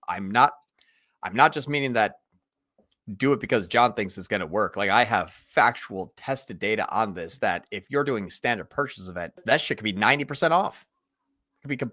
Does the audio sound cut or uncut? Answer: cut